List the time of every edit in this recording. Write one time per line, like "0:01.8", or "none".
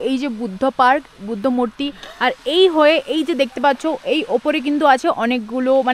none